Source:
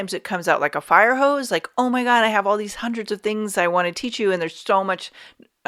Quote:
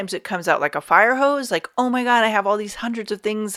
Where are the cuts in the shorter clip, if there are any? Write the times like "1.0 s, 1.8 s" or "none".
none

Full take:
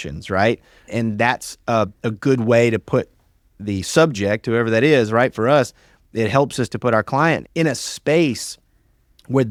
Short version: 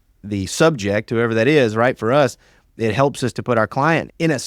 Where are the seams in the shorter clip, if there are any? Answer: none

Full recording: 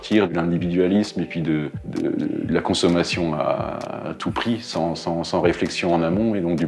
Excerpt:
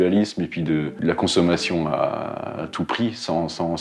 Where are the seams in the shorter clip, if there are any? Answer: 1.0 s

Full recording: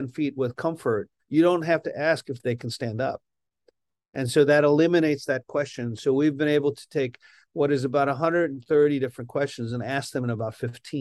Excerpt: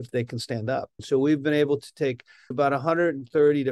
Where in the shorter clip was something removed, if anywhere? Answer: 1.0 s, 2.5 s

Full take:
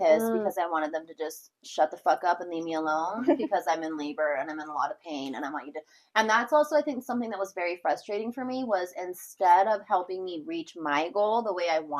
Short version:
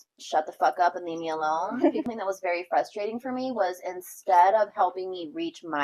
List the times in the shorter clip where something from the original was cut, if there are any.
2.1 s

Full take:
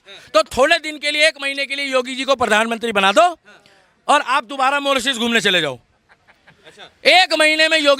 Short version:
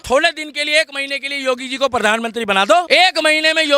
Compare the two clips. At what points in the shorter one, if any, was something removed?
2.9 s

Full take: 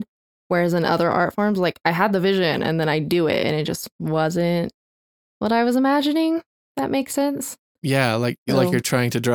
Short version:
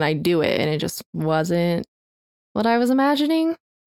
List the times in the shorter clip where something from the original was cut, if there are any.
none

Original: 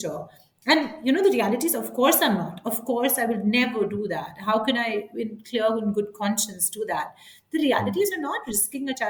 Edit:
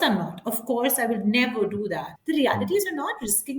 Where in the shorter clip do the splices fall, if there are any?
2.1 s

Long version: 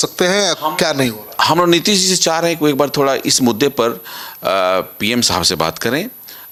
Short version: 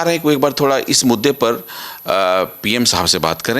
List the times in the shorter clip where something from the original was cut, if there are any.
none

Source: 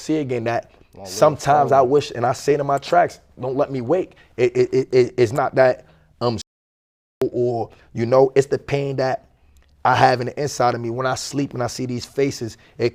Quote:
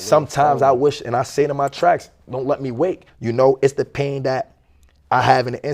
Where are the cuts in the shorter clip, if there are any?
3.1 s

